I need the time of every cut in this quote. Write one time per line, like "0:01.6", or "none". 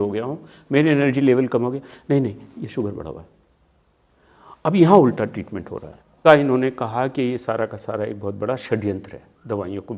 0:06.2